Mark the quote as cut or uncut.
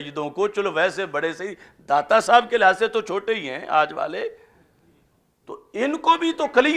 uncut